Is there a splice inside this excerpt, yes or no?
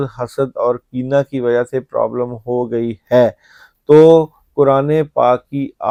no